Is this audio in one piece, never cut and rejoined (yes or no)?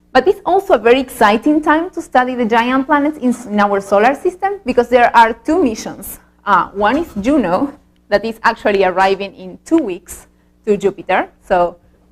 no